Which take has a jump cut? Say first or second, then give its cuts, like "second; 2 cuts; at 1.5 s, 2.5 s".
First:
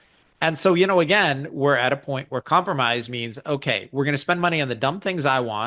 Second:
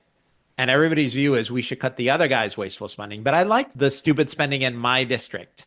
second; 1 cut; at 3.7 s